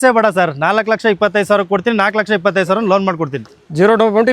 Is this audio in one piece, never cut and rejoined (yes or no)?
yes